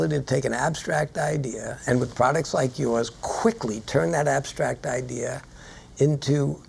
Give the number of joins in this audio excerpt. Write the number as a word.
zero